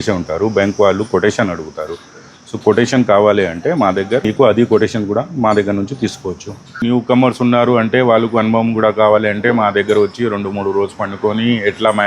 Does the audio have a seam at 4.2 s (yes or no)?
yes